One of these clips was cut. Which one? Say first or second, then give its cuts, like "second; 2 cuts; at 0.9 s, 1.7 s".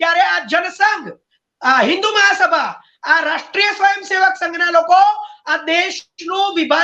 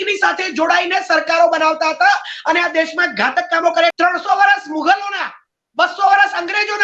second; 1 cut; at 3.9 s